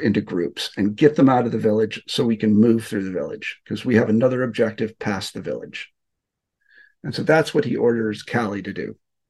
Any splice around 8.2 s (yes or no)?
no